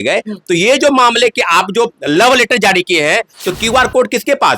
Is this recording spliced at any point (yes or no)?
yes